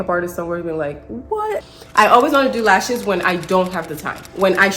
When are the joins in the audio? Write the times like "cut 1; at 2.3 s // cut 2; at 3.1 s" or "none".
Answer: cut 1; at 1.6 s